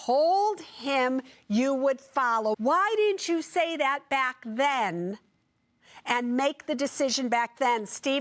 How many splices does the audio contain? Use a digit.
1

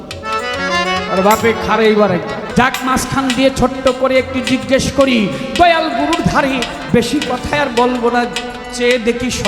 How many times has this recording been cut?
1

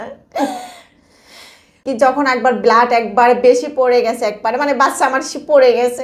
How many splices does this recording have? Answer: 1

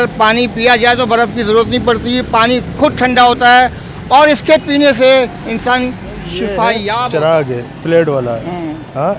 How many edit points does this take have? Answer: 1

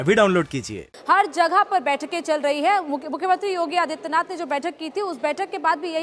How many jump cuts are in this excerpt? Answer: 1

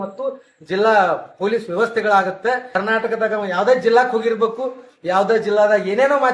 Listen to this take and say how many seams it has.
1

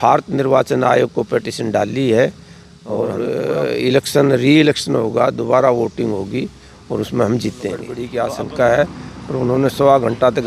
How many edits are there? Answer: 2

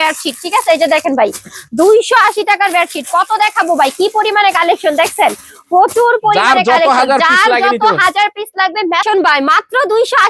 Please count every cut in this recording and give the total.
1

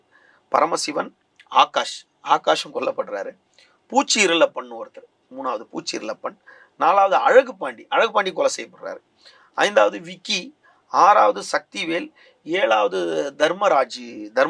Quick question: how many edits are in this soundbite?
0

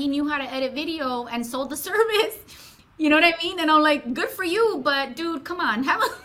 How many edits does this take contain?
0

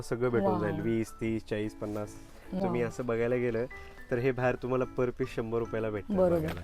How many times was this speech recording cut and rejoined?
1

